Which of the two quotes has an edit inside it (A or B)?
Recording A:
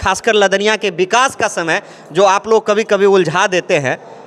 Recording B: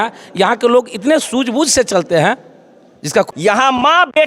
B